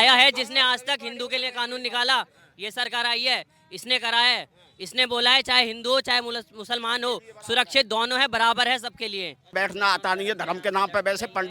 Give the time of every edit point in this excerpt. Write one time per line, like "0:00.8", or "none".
0:09.5